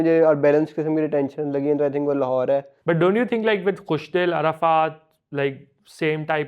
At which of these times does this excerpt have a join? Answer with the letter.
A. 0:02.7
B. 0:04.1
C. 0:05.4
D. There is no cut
A